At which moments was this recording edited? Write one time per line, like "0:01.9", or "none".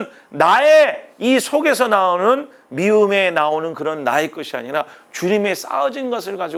none